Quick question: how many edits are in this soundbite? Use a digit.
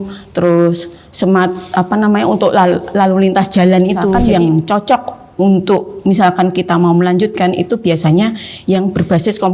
1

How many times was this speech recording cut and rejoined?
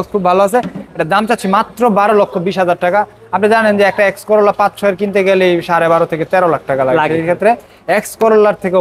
0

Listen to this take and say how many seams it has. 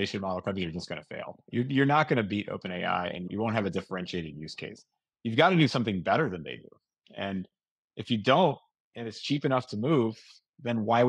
1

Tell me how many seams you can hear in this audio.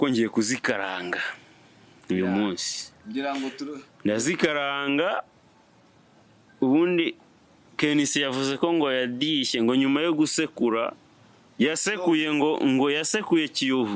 0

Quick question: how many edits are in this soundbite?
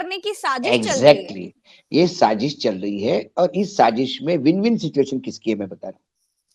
0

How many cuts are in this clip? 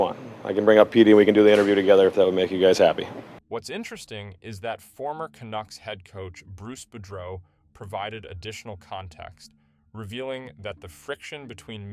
0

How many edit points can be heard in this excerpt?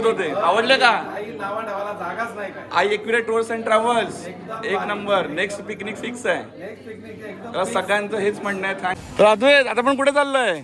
1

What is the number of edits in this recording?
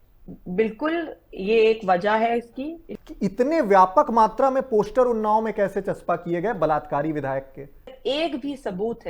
2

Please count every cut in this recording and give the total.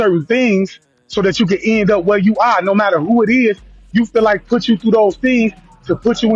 0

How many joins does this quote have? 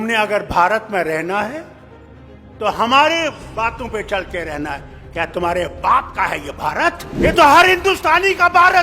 1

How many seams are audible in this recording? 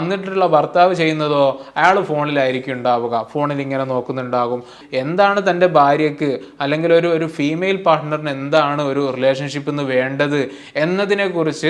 1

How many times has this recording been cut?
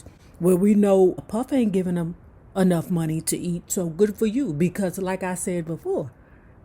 1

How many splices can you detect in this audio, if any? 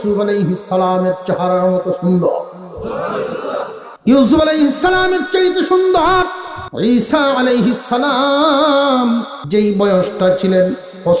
1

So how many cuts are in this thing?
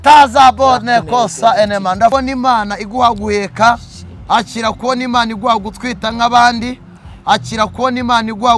1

